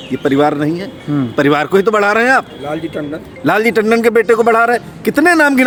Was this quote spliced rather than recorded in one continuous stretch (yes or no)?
no